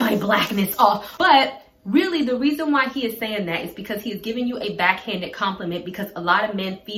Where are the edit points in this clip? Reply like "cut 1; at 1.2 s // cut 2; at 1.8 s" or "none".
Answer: cut 1; at 1.1 s